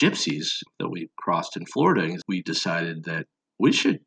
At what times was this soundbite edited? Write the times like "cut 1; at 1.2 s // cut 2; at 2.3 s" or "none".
cut 1; at 2.2 s